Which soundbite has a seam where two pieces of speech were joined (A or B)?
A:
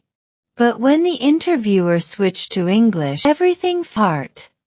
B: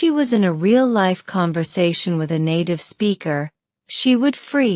A